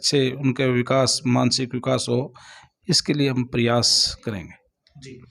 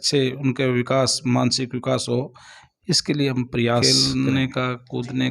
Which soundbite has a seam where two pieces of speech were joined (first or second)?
second